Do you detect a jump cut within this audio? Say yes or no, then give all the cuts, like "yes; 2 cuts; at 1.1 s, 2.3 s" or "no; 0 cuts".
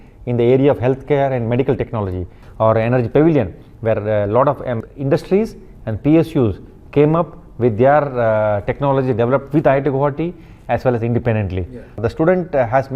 yes; 2 cuts; at 2.4 s, 12.0 s